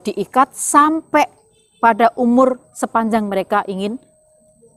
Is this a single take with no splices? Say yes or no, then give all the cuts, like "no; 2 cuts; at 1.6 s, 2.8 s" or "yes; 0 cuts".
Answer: yes; 0 cuts